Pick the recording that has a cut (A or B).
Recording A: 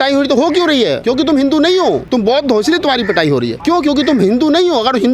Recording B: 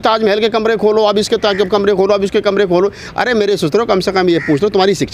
A